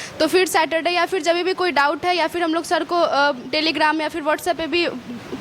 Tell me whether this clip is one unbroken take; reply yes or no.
yes